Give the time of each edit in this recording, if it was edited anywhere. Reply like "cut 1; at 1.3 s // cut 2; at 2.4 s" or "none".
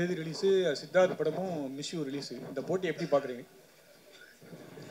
none